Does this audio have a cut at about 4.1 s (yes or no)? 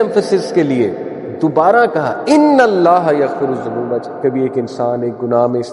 yes